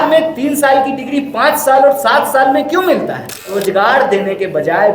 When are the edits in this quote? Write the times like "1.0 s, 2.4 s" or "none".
3.4 s